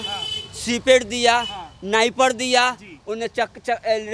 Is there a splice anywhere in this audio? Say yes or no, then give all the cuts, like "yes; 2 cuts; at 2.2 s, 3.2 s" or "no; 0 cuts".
no; 0 cuts